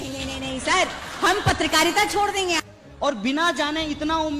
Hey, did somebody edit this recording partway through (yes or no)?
yes